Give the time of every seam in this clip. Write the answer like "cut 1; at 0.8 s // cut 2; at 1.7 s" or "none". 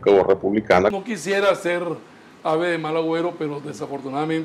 cut 1; at 0.9 s